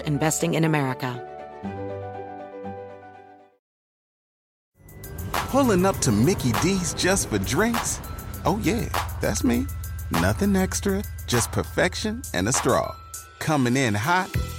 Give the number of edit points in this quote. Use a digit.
1